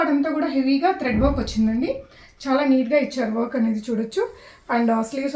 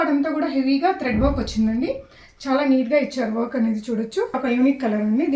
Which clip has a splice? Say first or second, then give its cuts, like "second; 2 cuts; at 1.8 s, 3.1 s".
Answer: second; 1 cut; at 4.4 s